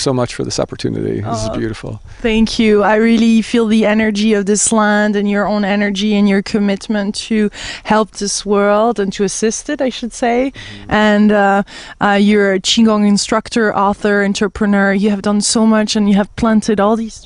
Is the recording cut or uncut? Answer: cut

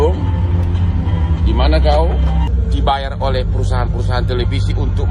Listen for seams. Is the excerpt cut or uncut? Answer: cut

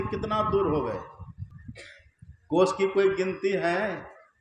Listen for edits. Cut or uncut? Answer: cut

